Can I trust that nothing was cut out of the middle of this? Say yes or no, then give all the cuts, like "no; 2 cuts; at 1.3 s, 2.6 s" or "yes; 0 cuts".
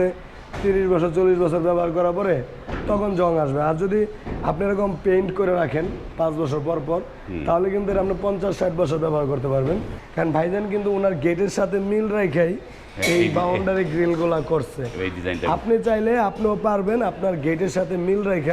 no; 1 cut; at 10.0 s